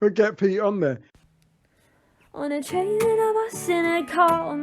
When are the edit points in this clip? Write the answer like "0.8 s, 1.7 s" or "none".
1.1 s